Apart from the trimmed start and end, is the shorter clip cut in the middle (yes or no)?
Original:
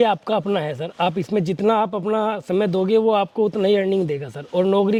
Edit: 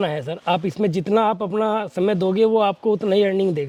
no